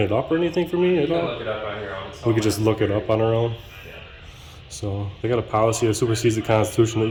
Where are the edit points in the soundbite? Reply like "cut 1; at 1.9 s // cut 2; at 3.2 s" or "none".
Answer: none